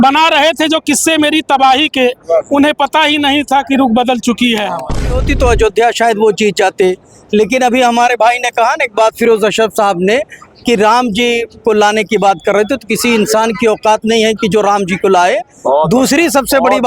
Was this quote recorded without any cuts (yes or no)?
no